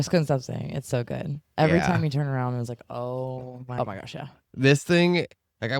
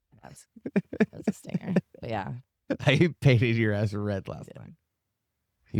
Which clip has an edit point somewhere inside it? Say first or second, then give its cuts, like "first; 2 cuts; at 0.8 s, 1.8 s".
first; 1 cut; at 3.6 s